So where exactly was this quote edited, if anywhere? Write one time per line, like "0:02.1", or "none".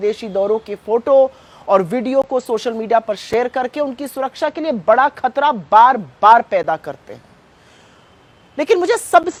none